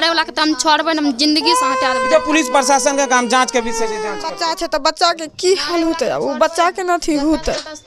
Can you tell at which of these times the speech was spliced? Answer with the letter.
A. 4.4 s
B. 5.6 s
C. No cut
A